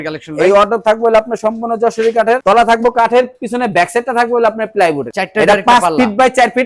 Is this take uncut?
yes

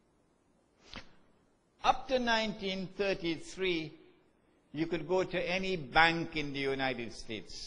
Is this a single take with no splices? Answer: no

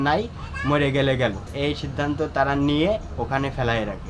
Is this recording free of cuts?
no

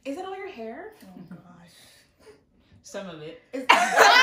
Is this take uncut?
yes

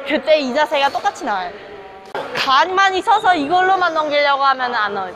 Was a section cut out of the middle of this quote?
yes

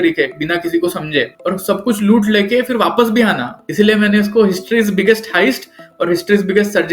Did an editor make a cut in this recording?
yes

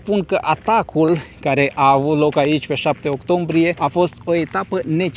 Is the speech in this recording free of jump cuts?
yes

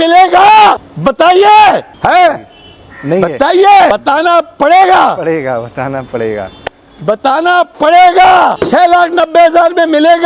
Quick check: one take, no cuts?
no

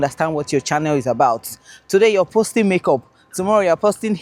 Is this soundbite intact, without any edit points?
yes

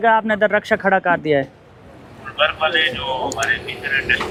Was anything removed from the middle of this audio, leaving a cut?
no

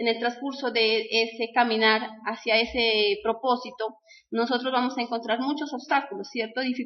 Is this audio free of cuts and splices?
no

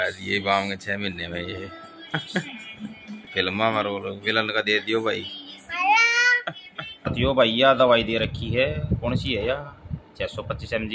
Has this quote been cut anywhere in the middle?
yes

